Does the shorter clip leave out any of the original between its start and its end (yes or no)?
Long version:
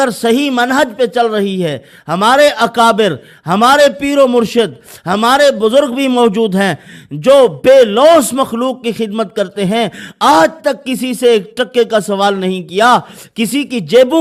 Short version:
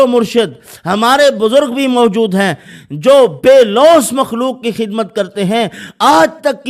no